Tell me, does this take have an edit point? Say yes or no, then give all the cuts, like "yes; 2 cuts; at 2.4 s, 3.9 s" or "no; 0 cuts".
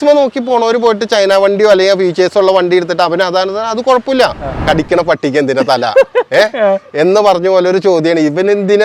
yes; 1 cut; at 4.6 s